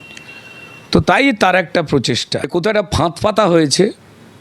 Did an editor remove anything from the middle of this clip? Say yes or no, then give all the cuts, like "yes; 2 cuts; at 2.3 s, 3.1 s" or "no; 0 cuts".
yes; 1 cut; at 2.4 s